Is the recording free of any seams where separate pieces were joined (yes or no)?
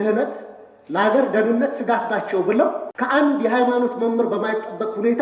no